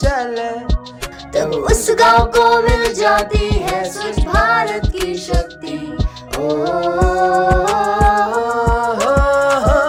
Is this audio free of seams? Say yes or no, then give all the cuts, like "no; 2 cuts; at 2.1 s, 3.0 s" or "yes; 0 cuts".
yes; 0 cuts